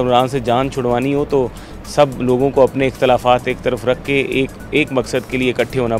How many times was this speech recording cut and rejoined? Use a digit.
0